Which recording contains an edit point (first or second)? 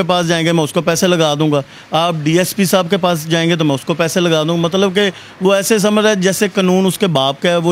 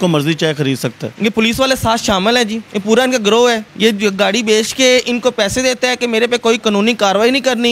second